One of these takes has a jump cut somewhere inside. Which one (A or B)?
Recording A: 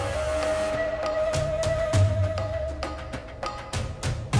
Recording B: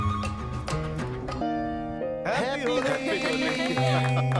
B